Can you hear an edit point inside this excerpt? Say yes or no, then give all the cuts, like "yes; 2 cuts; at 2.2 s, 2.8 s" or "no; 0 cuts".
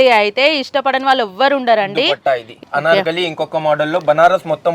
yes; 1 cut; at 2.5 s